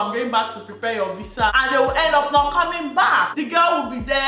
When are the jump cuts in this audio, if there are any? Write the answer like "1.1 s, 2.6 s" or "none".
1.5 s